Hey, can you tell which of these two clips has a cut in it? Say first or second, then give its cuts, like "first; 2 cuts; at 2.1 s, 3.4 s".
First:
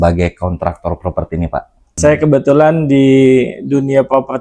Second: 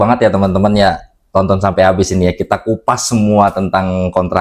first; 1 cut; at 2.0 s